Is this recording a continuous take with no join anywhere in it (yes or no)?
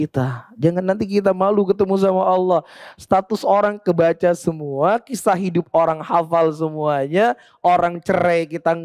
yes